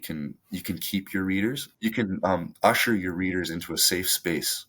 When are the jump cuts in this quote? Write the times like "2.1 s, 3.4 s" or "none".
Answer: 1.6 s